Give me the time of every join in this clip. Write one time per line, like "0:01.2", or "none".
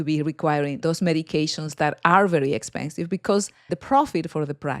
0:00.8
0:03.7